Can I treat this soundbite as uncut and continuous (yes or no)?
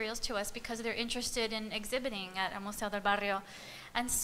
no